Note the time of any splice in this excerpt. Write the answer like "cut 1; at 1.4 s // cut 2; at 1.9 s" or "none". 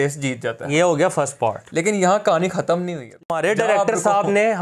cut 1; at 3.2 s